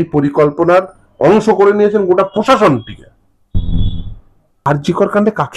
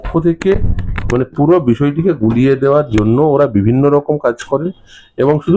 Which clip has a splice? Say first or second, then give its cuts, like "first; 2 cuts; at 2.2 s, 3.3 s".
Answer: first; 1 cut; at 4.7 s